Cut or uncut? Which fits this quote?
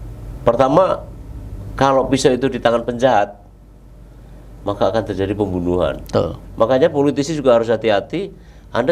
cut